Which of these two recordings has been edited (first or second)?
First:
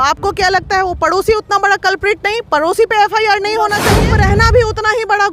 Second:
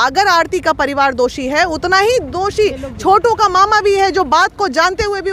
first